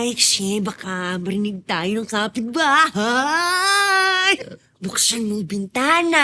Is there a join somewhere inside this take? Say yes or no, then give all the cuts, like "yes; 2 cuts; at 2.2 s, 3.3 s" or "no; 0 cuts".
yes; 1 cut; at 4.4 s